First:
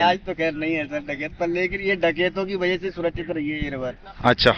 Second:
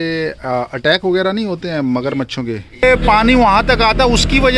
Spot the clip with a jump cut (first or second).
second